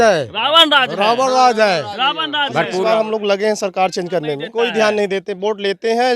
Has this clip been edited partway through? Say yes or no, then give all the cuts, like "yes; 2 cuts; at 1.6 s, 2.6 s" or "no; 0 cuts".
yes; 2 cuts; at 2.8 s, 4.5 s